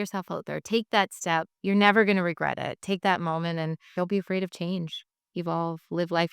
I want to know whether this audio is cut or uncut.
cut